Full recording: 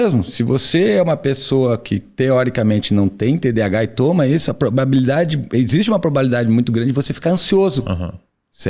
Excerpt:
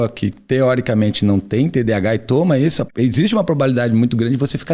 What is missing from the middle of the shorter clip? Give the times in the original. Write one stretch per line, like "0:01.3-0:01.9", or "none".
0:04.5-0:05.4